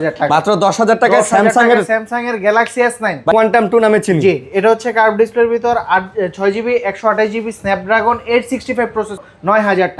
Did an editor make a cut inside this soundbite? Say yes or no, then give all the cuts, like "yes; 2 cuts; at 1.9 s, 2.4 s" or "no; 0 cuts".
yes; 2 cuts; at 3.3 s, 9.2 s